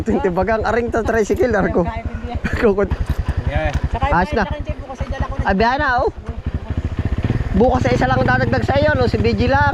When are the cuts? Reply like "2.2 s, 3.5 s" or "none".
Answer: 2.9 s